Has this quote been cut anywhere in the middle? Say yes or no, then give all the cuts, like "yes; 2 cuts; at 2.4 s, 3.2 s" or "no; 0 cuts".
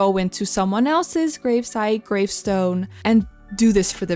yes; 1 cut; at 3.0 s